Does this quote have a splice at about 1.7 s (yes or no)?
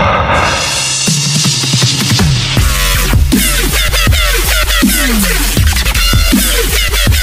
no